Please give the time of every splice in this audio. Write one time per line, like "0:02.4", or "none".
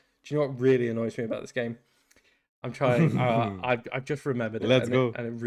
none